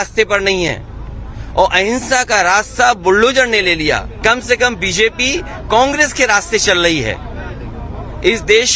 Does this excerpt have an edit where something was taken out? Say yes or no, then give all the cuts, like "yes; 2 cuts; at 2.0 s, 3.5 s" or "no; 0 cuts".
yes; 1 cut; at 4.1 s